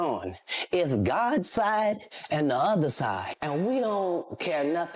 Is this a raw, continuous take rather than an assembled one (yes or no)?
yes